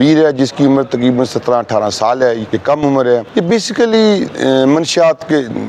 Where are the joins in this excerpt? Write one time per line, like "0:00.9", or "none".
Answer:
0:02.5
0:03.3